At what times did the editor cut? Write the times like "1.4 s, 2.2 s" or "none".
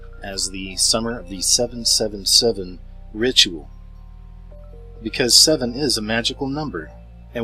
none